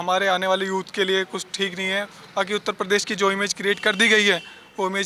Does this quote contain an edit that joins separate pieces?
no; 0 cuts

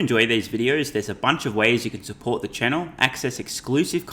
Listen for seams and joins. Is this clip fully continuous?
yes; 0 cuts

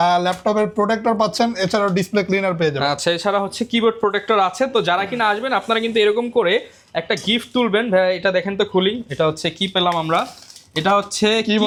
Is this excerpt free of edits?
yes; 0 cuts

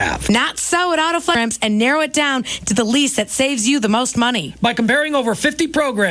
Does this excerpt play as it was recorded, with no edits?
no; 1 cut; at 1.4 s

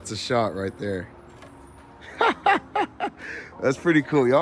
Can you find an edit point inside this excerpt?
no; 0 cuts

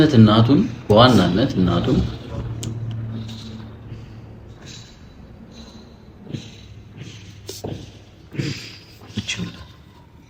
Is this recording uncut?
yes; 0 cuts

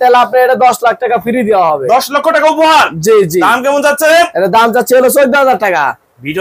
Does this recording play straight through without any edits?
yes; 0 cuts

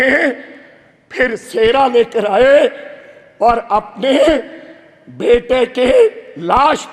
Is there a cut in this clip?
no; 0 cuts

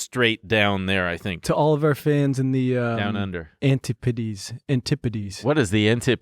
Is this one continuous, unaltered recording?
no; 1 cut; at 5.3 s

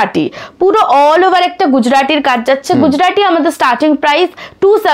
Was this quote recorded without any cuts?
yes; 0 cuts

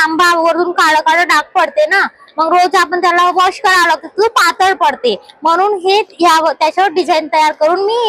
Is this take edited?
no; 0 cuts

